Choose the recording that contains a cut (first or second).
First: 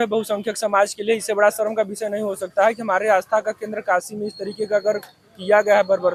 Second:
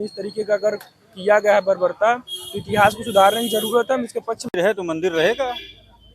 second